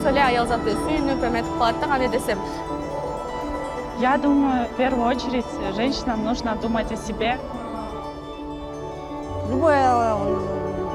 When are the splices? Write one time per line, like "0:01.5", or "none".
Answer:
none